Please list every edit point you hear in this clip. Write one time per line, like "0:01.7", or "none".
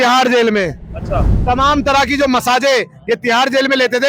0:01.3